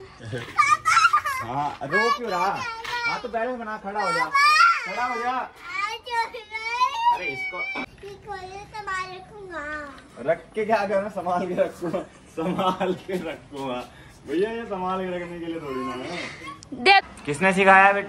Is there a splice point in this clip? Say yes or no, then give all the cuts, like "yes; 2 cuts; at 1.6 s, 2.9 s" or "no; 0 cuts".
yes; 2 cuts; at 7.9 s, 17.0 s